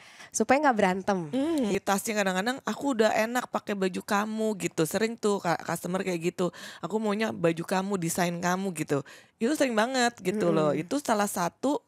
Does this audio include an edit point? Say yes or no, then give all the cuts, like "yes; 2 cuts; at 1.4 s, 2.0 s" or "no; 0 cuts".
yes; 1 cut; at 1.7 s